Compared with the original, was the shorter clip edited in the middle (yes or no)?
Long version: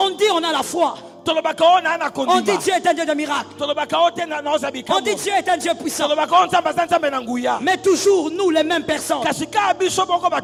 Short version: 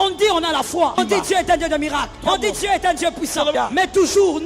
yes